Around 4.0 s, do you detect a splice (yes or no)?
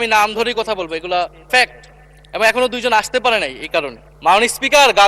yes